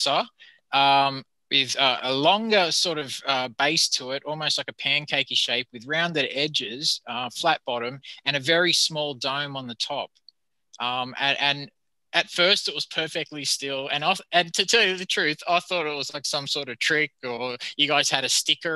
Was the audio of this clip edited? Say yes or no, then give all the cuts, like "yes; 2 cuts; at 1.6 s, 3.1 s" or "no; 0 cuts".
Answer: no; 0 cuts